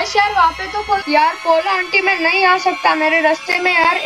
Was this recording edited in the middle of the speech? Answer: yes; 1 cut; at 1.0 s

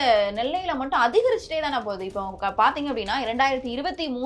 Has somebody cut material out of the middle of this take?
no; 0 cuts

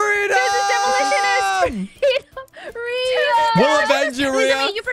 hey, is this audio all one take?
yes; 0 cuts

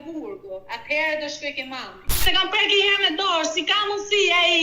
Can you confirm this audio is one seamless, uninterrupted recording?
no; 1 cut; at 2.1 s

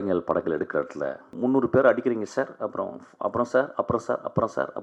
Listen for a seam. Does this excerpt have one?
yes; 1 cut; at 1.3 s

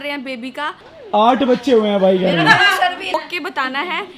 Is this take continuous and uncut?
no; 2 cuts; at 0.9 s, 3.1 s

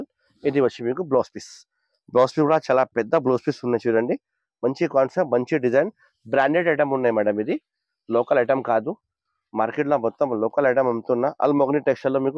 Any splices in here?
no; 0 cuts

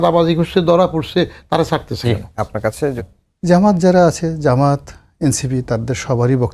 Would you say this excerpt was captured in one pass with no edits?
no; 1 cut; at 3.0 s

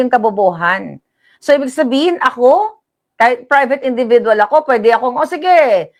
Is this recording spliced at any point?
no; 0 cuts

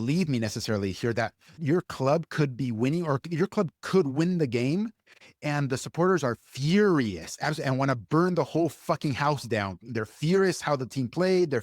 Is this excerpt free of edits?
no; 1 cut; at 1.6 s

